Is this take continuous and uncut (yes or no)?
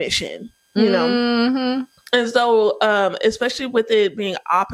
yes